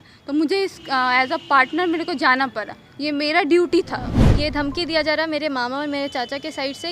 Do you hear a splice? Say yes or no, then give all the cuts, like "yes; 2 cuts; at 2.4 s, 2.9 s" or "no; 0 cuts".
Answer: yes; 1 cut; at 4.2 s